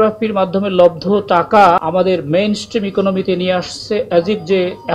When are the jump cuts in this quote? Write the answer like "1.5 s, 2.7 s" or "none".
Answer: 1.8 s